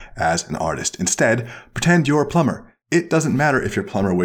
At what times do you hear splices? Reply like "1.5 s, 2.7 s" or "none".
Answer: 2.7 s